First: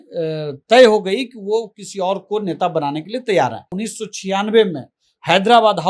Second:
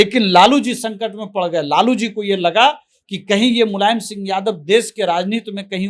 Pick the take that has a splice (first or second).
first